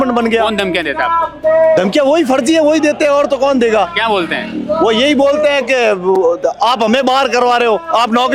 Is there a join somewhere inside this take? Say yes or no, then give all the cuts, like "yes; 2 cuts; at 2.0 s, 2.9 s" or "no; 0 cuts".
no; 0 cuts